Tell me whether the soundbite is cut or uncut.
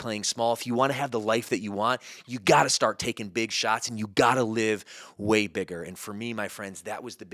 uncut